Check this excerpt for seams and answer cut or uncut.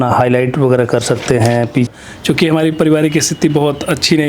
cut